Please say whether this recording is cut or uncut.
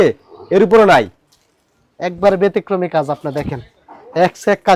uncut